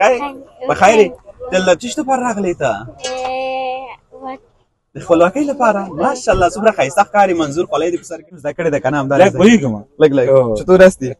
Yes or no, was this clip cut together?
yes